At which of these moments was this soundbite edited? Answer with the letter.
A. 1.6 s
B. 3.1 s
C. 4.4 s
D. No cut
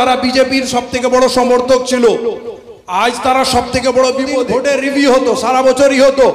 C